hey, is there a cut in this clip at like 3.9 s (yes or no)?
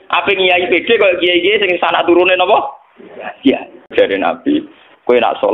yes